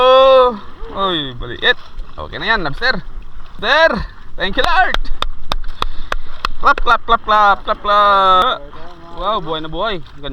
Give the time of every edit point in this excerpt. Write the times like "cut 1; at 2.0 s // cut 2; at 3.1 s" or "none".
cut 1; at 3.6 s // cut 2; at 8.4 s